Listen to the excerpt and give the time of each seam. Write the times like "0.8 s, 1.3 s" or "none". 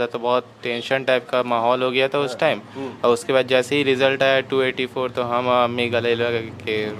none